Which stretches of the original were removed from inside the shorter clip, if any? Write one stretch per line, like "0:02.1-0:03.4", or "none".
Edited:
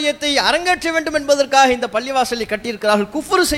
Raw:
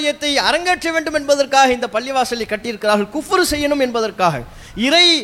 none